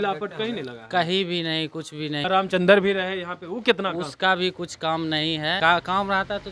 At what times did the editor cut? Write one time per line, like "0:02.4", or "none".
0:02.3
0:05.6